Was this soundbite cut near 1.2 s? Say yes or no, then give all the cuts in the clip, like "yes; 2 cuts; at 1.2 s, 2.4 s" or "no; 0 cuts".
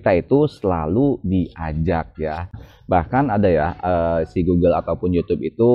no; 1 cut; at 2.7 s